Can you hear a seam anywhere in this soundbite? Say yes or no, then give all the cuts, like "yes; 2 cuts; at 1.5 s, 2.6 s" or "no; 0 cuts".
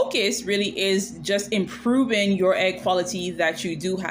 no; 0 cuts